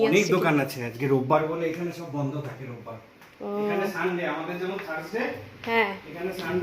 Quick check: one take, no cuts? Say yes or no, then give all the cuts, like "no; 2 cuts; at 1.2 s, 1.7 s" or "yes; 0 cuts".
yes; 0 cuts